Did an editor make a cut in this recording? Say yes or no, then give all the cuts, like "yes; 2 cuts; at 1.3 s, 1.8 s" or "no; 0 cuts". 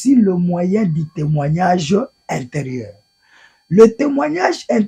no; 0 cuts